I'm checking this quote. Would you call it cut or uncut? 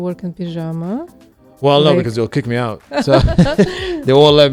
uncut